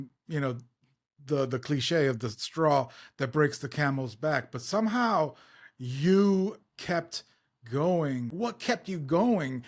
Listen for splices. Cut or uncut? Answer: cut